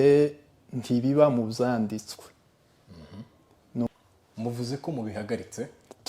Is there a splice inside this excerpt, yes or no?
yes